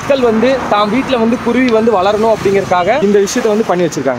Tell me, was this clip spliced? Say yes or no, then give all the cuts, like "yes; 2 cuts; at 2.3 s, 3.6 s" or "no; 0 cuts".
yes; 1 cut; at 3.0 s